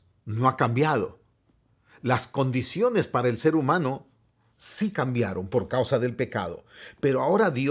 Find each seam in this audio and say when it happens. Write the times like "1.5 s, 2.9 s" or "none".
none